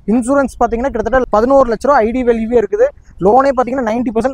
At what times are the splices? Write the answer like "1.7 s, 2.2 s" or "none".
none